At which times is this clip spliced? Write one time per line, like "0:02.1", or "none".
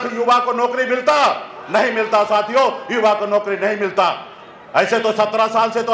none